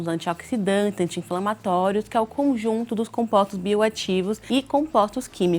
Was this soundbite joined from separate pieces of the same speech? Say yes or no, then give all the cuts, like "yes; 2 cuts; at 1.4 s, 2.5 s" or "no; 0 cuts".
yes; 1 cut; at 4.4 s